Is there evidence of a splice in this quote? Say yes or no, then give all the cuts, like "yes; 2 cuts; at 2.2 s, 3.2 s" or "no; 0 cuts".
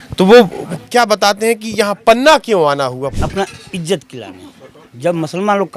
yes; 1 cut; at 3.0 s